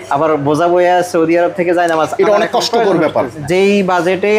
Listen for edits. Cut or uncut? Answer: cut